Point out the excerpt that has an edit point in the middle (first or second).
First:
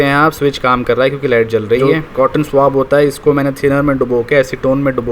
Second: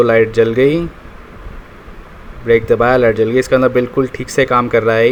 first